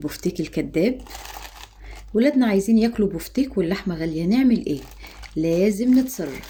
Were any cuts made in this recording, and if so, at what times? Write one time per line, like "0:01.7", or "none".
none